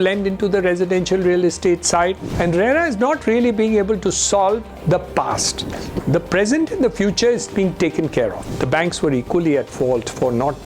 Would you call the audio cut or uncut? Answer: cut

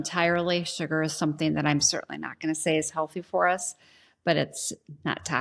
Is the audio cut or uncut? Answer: uncut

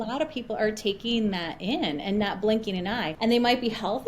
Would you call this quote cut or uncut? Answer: cut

